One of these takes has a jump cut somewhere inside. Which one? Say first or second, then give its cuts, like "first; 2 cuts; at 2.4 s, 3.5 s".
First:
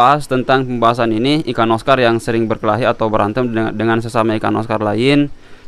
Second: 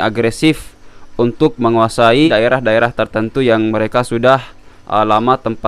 second; 1 cut; at 2.3 s